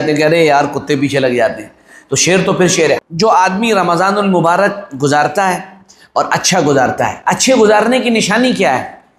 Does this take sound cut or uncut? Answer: cut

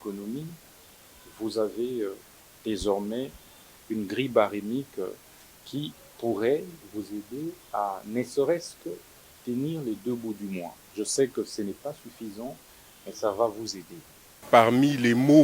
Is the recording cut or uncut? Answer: cut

